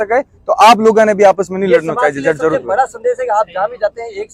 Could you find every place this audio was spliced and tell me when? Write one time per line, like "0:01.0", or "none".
none